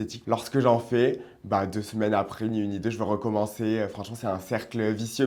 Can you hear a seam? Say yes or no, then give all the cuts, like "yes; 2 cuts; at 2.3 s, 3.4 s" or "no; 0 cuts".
no; 0 cuts